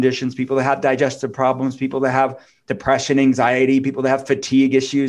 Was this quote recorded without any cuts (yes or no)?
yes